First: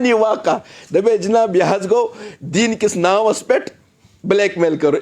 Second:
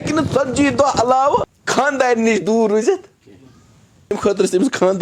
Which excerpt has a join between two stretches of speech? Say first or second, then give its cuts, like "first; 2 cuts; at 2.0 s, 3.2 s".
second; 2 cuts; at 1.6 s, 4.1 s